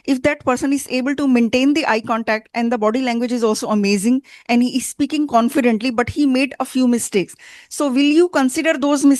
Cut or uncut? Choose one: uncut